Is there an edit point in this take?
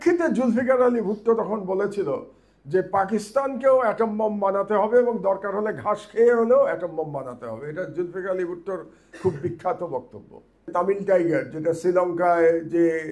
yes; 1 cut; at 10.7 s

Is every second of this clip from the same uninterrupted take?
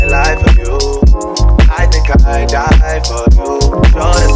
yes; 0 cuts

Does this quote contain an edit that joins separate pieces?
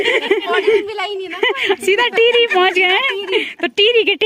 no; 0 cuts

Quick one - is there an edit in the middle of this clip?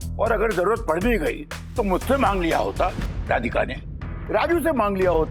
no; 0 cuts

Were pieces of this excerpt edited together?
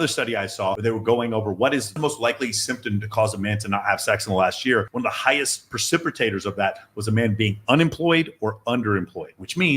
yes; 2 cuts; at 0.8 s, 1.9 s

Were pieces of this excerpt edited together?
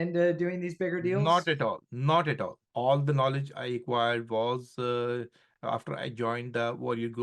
yes; 1 cut; at 2.6 s

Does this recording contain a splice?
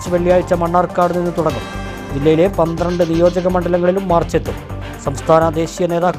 no; 0 cuts

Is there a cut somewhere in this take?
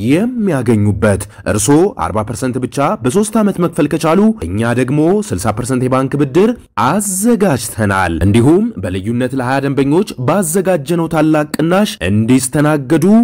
no; 0 cuts

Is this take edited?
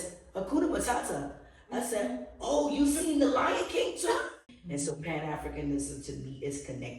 yes; 1 cut; at 4.3 s

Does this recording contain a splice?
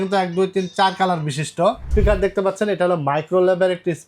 yes; 1 cut; at 1.9 s

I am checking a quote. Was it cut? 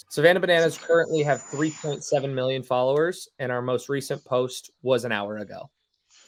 no; 0 cuts

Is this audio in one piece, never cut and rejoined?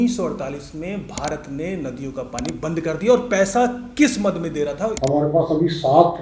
no; 1 cut; at 4.9 s

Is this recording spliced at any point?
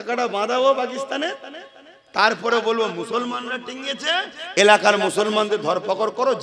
no; 0 cuts

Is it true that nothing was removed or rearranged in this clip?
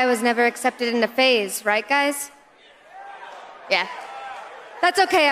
yes; 0 cuts

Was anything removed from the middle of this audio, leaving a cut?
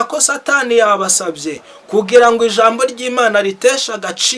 no; 0 cuts

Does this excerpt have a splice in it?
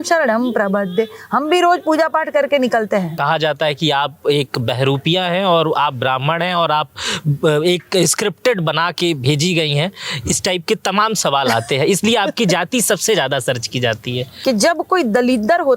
yes; 2 cuts; at 3.1 s, 14.3 s

